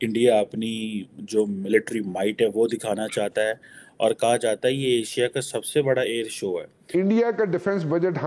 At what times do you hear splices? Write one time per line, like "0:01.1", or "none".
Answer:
0:06.8